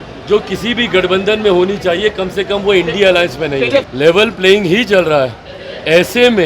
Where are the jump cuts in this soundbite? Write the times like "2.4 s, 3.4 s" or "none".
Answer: 3.9 s